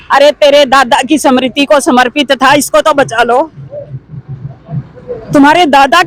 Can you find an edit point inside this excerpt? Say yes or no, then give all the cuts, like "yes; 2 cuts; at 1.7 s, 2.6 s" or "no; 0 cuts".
no; 0 cuts